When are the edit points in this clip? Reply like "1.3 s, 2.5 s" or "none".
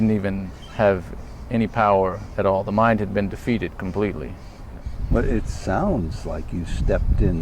4.9 s